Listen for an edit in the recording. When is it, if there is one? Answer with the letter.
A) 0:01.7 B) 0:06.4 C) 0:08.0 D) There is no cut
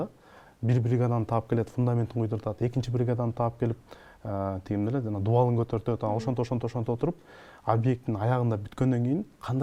D